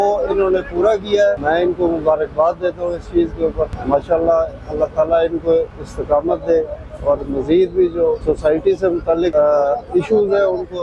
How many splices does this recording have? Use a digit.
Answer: 4